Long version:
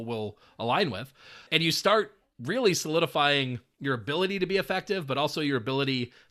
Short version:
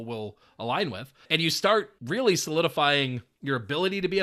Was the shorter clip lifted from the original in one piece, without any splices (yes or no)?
no